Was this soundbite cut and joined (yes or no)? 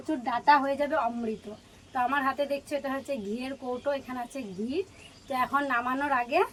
no